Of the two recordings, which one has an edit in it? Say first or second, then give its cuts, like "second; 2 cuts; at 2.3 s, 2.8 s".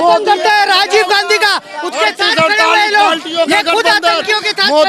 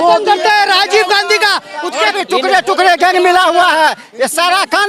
second; 1 cut; at 2.1 s